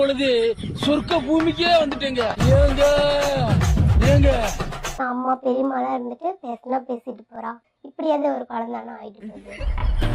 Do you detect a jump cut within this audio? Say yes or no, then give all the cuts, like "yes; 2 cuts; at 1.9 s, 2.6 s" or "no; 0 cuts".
yes; 1 cut; at 5.0 s